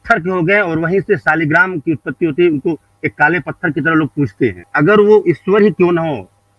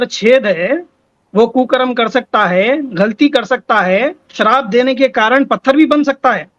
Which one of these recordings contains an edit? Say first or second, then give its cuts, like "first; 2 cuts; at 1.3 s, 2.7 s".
first; 1 cut; at 4.6 s